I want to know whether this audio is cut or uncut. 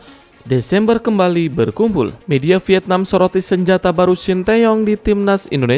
cut